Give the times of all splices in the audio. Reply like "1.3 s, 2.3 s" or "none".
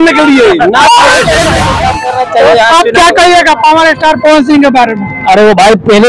1.7 s